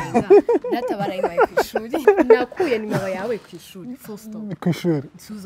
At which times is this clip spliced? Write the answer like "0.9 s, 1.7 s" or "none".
2.0 s